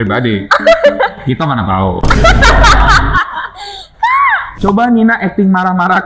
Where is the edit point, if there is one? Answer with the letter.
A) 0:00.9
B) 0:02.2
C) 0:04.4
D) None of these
C